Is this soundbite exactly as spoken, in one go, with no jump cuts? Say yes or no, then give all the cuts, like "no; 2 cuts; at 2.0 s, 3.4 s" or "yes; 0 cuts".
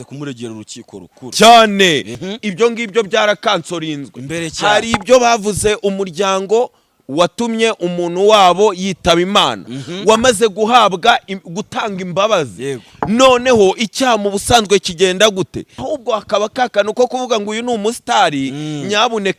no; 2 cuts; at 2.1 s, 15.8 s